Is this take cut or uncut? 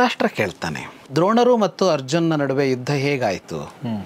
cut